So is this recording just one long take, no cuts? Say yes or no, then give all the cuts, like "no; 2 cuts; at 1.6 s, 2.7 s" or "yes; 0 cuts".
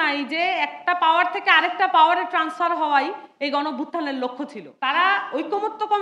no; 1 cut; at 5.1 s